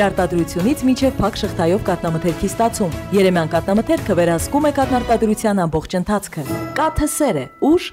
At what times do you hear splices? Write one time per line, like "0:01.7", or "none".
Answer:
none